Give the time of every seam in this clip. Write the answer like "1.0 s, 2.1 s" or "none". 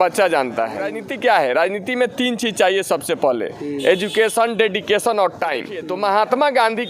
1.0 s, 5.8 s